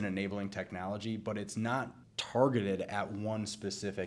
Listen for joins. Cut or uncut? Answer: uncut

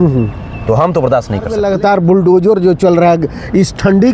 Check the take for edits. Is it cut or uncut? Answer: cut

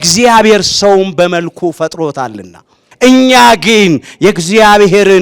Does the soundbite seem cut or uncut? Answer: cut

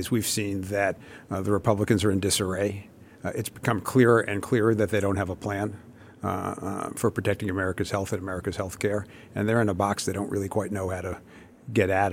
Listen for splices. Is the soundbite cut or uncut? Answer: uncut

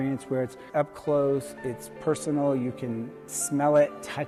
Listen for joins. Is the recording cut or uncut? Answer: uncut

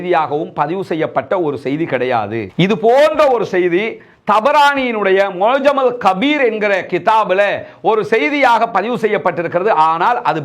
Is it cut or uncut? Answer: uncut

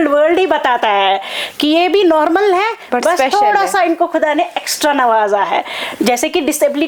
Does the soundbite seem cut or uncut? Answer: uncut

